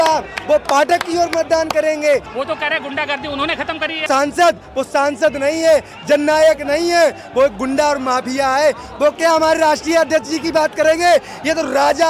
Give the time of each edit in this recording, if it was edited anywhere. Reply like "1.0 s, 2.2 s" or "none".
2.3 s, 4.1 s